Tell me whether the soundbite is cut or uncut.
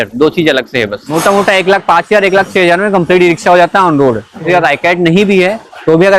cut